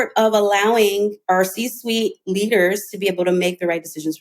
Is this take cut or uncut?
cut